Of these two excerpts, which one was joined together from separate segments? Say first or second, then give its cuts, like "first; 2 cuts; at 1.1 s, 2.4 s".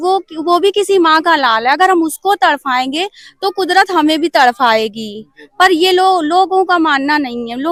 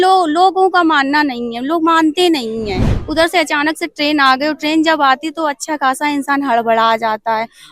second; 1 cut; at 2.9 s